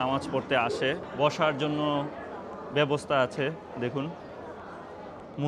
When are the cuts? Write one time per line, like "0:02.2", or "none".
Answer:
0:01.1